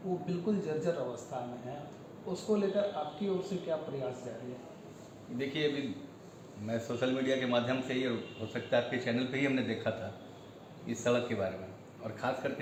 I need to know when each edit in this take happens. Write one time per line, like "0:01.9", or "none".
none